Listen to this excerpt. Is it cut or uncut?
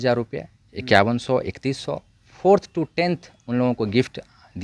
uncut